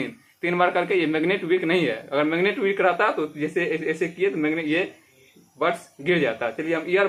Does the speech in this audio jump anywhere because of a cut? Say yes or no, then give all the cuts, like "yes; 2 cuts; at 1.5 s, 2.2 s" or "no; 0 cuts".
no; 0 cuts